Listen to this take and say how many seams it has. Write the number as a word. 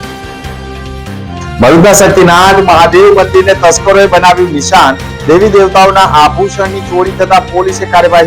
one